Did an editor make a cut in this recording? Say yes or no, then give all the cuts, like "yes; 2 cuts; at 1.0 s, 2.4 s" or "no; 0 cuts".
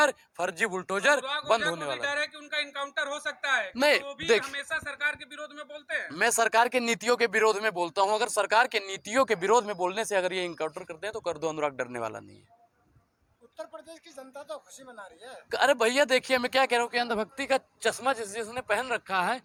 no; 0 cuts